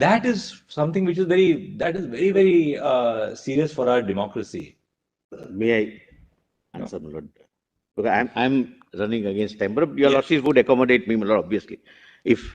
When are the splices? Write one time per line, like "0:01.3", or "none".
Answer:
none

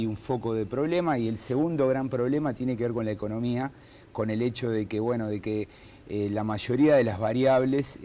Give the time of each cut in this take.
0:04.3

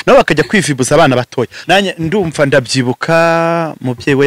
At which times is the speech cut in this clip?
0:01.6

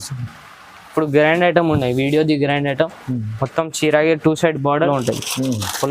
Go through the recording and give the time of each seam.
0:04.9

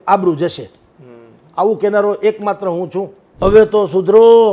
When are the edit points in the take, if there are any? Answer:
0:03.4

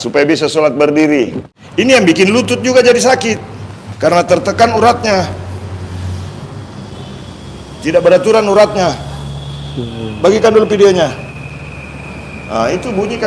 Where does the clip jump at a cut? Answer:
0:01.4

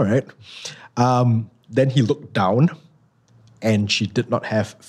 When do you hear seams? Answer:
none

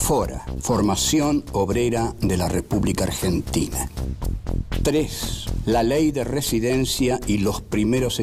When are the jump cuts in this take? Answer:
0:02.5

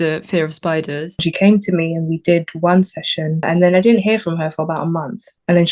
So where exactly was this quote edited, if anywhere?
0:01.2
0:03.4

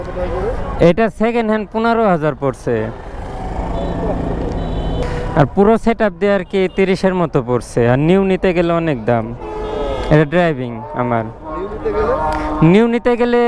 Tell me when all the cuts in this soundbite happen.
0:05.0

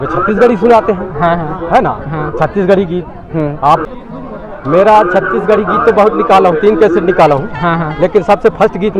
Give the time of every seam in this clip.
0:03.9

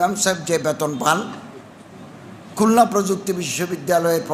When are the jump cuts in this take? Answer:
none

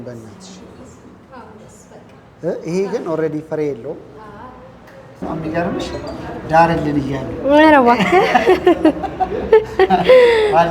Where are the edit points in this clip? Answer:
0:05.2

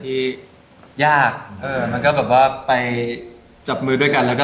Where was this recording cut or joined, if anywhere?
none

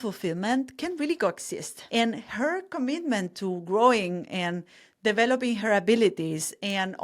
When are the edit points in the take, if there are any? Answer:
0:01.8

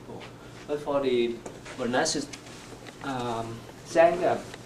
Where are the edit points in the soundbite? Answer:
0:02.2

